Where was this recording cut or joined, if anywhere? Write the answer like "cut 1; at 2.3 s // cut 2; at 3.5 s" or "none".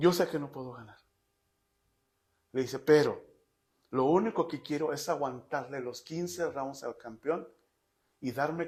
none